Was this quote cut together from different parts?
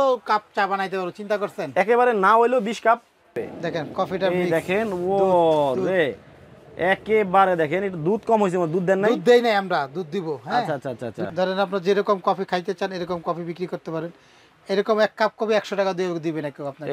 yes; 2 cuts; at 3.5 s, 11.3 s

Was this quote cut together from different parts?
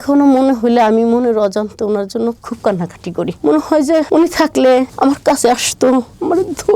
no; 0 cuts

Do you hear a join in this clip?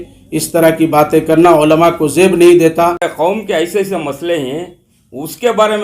yes; 1 cut; at 3.1 s

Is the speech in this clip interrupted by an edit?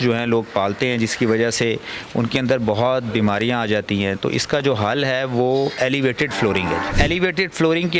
yes; 1 cut; at 6.9 s

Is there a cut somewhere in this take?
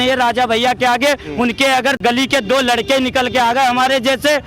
yes; 1 cut; at 2.0 s

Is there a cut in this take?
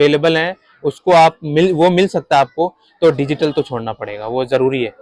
no; 0 cuts

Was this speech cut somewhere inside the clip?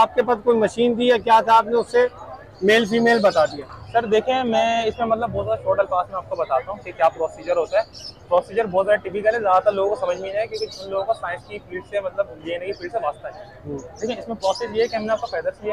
no; 0 cuts

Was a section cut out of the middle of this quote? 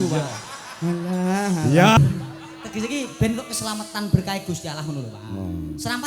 yes; 1 cut; at 2.0 s

